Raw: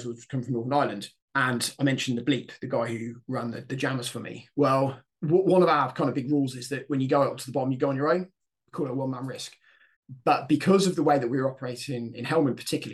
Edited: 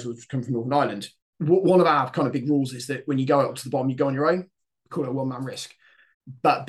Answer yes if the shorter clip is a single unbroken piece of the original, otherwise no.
no